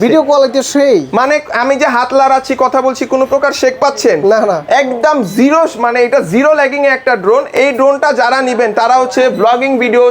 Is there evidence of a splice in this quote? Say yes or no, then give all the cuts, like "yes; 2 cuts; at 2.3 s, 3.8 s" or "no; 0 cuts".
no; 0 cuts